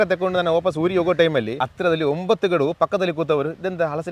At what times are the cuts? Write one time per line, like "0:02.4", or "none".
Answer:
0:01.5